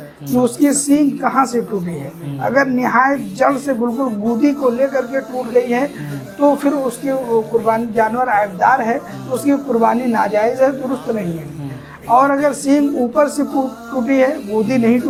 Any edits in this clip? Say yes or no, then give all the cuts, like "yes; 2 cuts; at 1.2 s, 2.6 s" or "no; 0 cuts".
no; 0 cuts